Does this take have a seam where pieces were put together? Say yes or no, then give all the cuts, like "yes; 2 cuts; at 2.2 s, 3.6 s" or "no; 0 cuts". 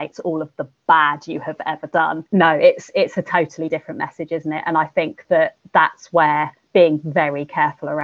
yes; 1 cut; at 2.2 s